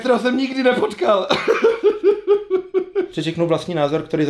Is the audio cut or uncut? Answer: cut